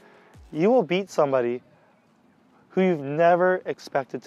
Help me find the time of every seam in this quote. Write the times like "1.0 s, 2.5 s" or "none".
none